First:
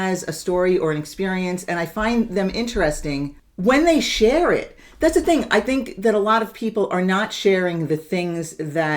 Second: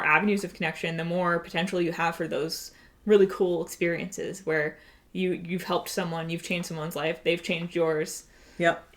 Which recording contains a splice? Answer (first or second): first